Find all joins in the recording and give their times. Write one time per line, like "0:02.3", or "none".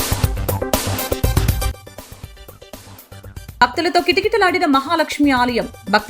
0:03.5